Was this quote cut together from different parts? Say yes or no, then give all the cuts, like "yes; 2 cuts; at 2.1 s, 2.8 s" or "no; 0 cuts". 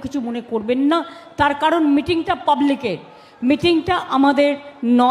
no; 0 cuts